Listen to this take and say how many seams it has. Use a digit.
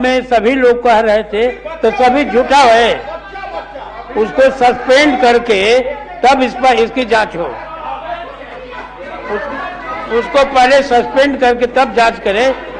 0